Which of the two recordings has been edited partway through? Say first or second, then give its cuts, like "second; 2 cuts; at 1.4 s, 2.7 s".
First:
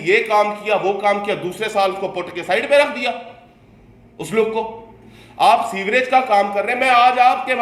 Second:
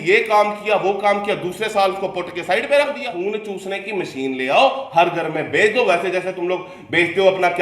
second; 1 cut; at 3.2 s